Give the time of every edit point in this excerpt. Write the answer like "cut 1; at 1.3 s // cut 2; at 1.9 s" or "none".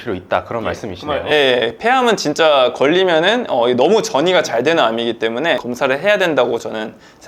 none